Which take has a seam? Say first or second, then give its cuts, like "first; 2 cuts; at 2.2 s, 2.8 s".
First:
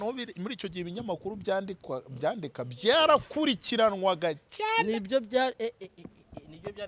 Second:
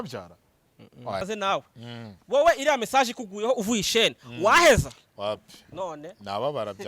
second; 1 cut; at 1.2 s